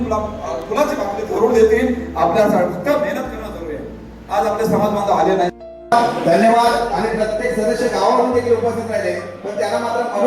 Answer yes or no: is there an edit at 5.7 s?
yes